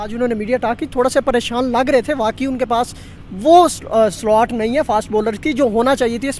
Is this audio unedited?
yes; 0 cuts

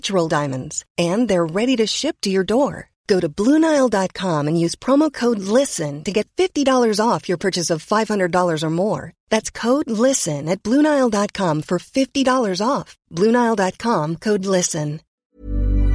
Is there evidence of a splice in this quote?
yes; 1 cut; at 15.0 s

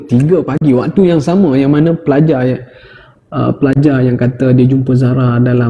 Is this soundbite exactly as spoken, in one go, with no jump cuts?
yes; 0 cuts

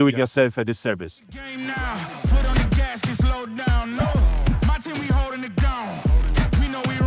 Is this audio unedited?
no; 1 cut; at 1.1 s

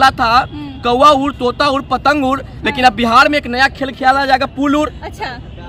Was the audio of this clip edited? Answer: no; 0 cuts

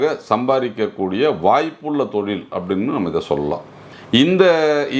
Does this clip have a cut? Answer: yes; 1 cut; at 3.9 s

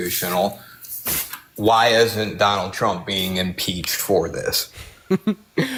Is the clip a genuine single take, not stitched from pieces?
yes; 0 cuts

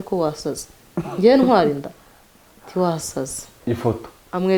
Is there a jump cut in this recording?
yes; 1 cut; at 3.5 s

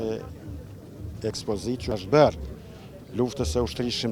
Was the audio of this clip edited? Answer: yes; 1 cut; at 2.0 s

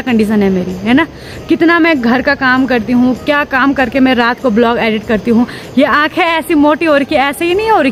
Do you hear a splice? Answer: no; 0 cuts

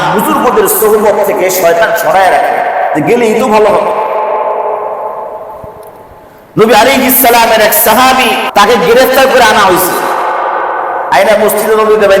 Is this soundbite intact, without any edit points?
no; 1 cut; at 8.4 s

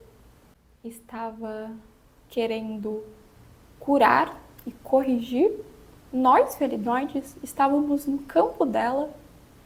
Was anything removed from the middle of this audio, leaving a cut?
no; 0 cuts

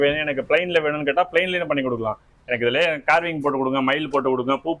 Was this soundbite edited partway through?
no; 0 cuts

